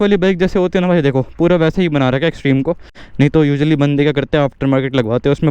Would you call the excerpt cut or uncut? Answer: cut